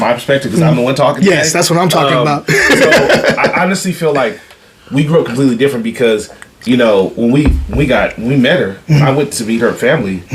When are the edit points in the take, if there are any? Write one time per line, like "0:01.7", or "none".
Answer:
none